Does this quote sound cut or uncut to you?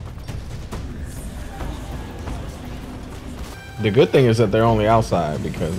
cut